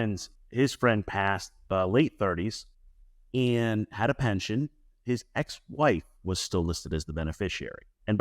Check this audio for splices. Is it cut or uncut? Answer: cut